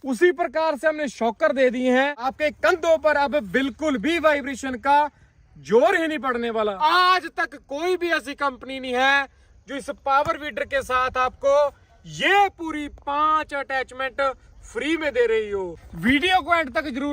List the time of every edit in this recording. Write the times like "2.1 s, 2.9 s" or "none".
2.3 s, 6.8 s, 15.8 s